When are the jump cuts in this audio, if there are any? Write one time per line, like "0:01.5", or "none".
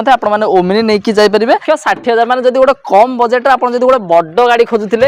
0:01.6